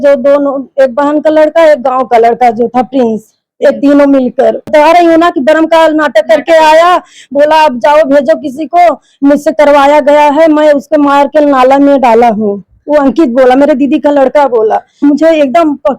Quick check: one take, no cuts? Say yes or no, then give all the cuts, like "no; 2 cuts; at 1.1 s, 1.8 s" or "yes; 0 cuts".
no; 2 cuts; at 4.7 s, 15.0 s